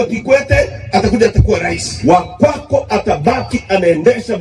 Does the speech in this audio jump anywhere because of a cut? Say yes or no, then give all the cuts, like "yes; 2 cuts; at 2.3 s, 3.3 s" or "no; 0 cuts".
yes; 1 cut; at 1.9 s